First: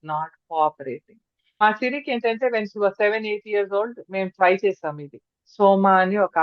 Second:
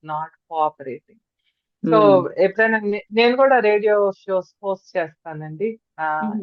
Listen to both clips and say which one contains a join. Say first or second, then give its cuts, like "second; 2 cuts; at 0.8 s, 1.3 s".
first; 1 cut; at 1.6 s